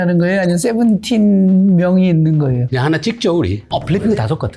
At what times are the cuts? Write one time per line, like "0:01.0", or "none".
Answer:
0:02.7
0:03.6